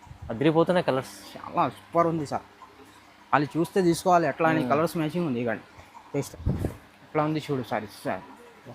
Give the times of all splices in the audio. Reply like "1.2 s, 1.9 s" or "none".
6.3 s